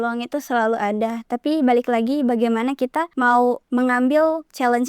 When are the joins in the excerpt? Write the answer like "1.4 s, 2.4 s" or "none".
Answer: 3.4 s